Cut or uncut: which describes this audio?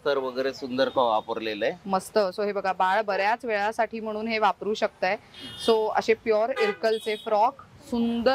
uncut